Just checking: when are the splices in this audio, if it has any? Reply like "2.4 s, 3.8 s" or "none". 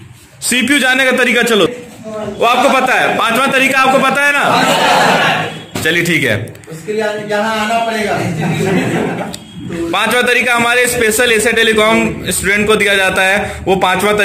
1.7 s